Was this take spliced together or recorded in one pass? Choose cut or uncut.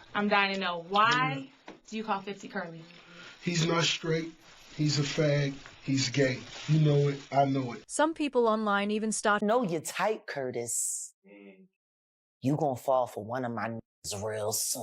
cut